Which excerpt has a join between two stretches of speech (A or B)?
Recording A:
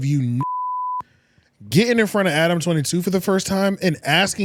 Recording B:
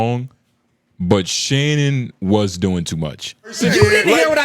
B